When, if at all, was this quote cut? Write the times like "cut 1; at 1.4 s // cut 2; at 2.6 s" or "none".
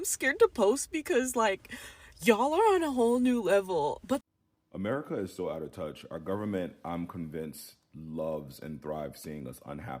cut 1; at 4.2 s